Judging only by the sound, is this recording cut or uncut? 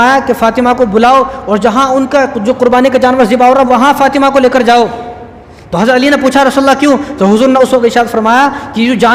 uncut